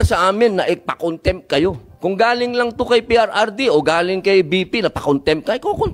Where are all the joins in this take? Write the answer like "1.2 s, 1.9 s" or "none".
1.9 s